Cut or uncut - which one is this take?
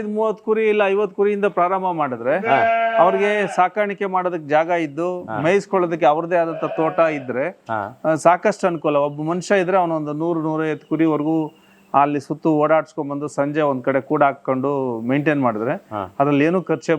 uncut